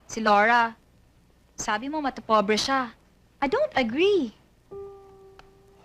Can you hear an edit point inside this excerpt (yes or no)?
yes